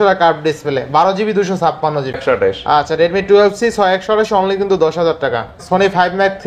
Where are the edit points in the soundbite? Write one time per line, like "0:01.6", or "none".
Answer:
0:02.2
0:05.6